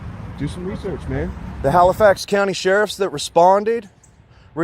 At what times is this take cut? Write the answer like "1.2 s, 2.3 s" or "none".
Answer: 1.4 s